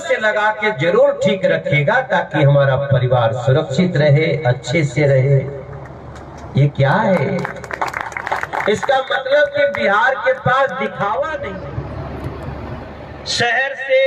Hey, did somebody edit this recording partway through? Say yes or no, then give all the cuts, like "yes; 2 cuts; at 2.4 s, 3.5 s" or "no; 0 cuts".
yes; 1 cut; at 11.5 s